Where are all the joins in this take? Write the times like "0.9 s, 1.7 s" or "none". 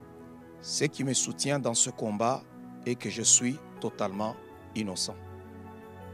5.2 s